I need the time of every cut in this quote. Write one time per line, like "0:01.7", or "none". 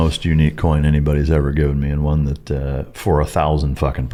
none